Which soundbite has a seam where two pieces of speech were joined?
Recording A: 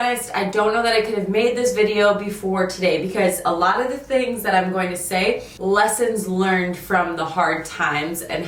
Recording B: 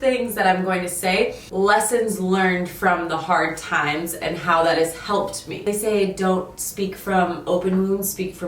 B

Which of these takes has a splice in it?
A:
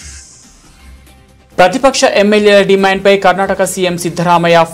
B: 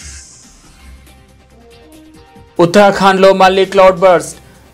A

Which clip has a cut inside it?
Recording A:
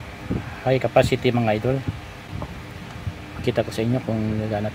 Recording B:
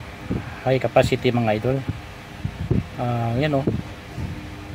A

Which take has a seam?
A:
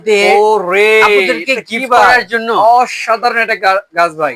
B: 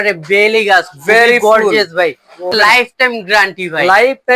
B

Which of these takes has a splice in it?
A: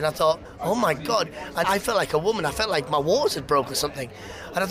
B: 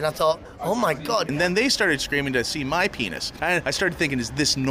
B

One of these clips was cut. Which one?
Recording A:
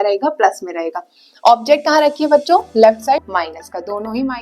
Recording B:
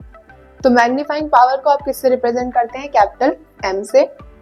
A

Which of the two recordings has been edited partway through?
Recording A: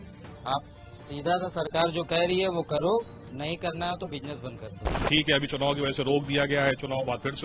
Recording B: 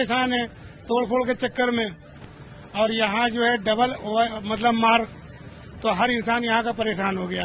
A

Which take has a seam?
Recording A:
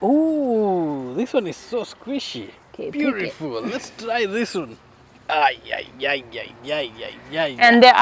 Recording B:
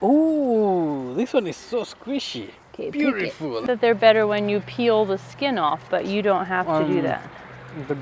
B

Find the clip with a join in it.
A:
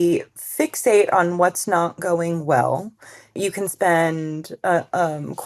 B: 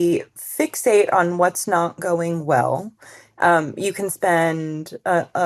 A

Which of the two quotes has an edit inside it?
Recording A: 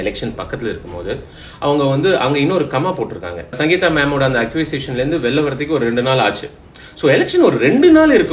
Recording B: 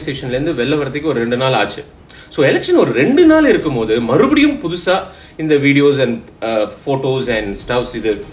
A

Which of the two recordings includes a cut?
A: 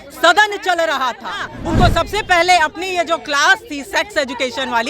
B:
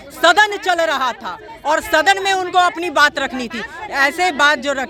A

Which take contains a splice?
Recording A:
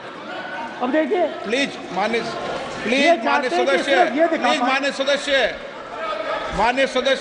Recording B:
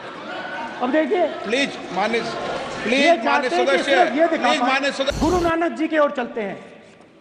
B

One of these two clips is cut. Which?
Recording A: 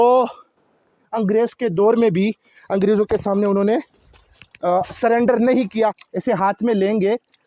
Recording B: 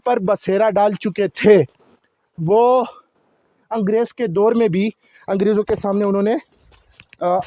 A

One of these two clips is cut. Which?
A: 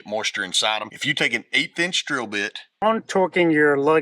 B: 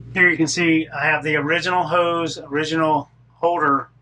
A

